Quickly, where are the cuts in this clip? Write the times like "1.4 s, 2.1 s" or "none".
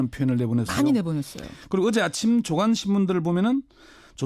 none